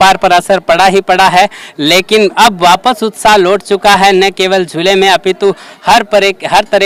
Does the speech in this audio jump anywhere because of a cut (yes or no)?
no